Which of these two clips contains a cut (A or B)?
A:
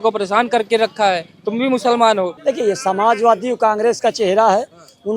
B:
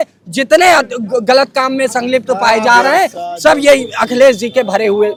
A